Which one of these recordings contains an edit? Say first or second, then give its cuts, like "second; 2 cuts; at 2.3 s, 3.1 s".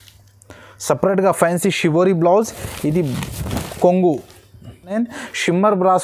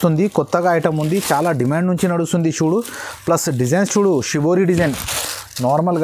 first; 1 cut; at 4.9 s